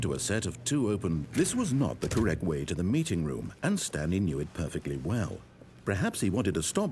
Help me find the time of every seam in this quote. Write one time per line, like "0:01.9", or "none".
0:01.3